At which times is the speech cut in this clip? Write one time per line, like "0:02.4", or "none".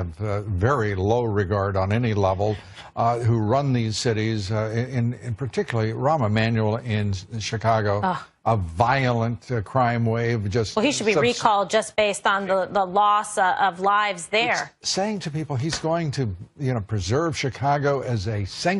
none